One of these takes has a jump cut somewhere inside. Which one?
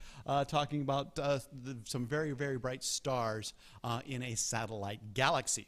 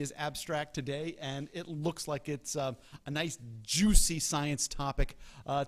second; 1 cut; at 4.0 s

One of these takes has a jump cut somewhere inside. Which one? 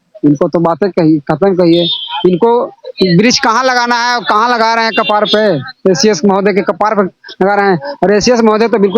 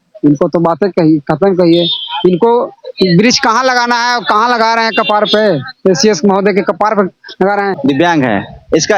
second; 1 cut; at 7.7 s

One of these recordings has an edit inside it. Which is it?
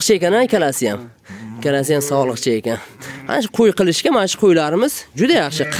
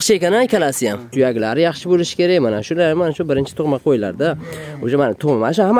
second; 1 cut; at 1.1 s

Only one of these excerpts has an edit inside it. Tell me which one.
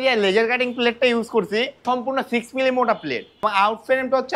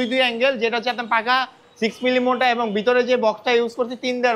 first; 2 cuts; at 1.8 s, 3.4 s

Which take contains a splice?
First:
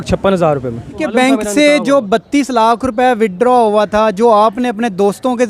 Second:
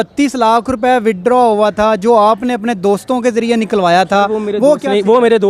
first; 1 cut; at 1.0 s

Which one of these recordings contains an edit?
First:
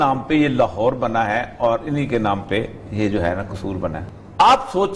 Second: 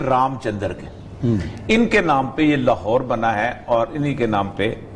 first; 1 cut; at 4.0 s

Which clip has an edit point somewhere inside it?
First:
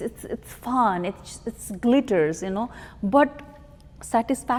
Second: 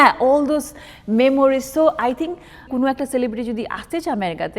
second; 1 cut; at 2.7 s

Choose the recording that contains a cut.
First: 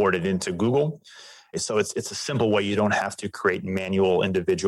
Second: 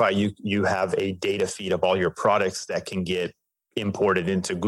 first; 1 cut; at 1.6 s

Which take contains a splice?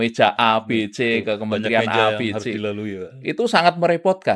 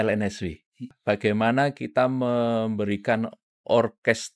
second; 1 cut; at 0.9 s

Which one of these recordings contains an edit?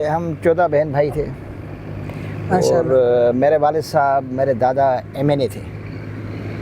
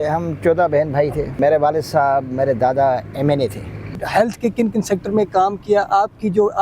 second; 2 cuts; at 1.4 s, 3.9 s

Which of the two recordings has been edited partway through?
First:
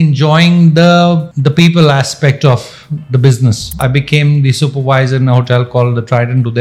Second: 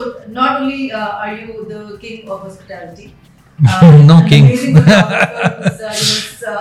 first; 2 cuts; at 1.3 s, 3.8 s

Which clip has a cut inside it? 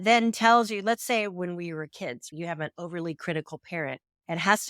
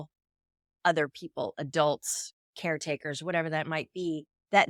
first; 1 cut; at 2.3 s

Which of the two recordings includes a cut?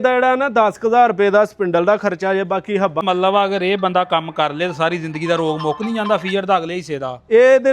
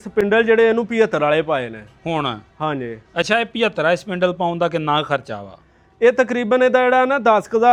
first; 1 cut; at 3.0 s

